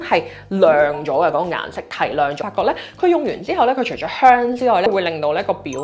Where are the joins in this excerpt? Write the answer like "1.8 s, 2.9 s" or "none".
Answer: 2.4 s, 4.9 s